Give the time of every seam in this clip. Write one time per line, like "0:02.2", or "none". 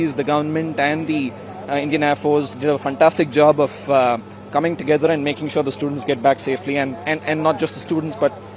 none